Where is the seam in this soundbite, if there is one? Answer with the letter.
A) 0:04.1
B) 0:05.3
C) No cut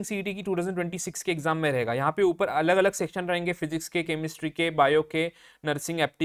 C